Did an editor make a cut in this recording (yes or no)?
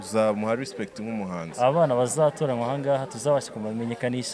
yes